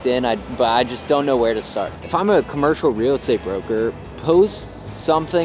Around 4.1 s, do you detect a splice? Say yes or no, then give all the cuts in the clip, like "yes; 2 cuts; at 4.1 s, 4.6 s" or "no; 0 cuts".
no; 1 cut; at 2.0 s